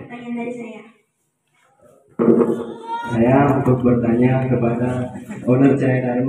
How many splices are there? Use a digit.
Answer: 1